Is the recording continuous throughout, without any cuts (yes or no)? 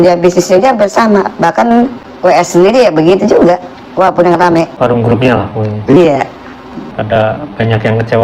no